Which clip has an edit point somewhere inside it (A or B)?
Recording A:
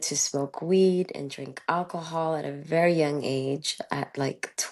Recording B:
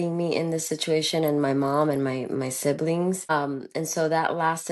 B